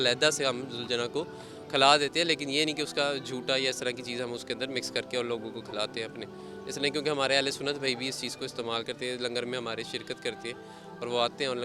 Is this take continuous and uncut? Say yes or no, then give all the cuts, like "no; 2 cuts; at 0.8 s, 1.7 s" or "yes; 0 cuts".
yes; 0 cuts